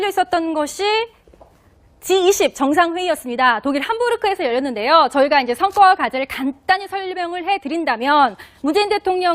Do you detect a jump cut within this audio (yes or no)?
yes